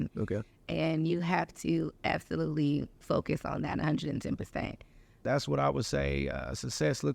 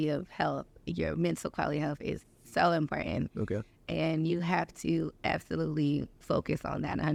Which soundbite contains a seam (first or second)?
first